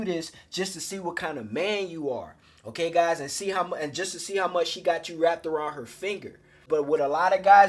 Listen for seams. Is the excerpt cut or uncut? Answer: cut